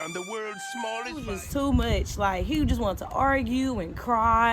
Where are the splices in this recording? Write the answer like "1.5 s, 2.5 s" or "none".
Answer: 1.4 s